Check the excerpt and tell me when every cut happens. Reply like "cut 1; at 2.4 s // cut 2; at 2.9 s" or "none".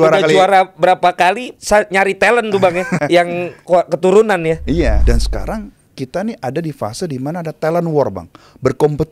cut 1; at 1.5 s // cut 2; at 3.0 s // cut 3; at 5.0 s